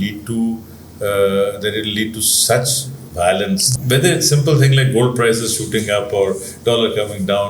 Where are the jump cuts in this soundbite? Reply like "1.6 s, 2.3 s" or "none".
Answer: 3.7 s